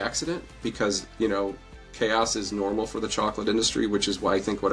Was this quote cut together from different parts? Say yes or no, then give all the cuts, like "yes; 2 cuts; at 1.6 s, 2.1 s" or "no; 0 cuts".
no; 0 cuts